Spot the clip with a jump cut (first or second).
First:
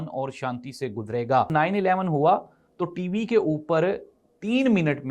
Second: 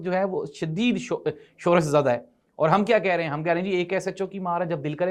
first